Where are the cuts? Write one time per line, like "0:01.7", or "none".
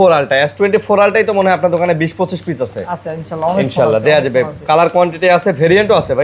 none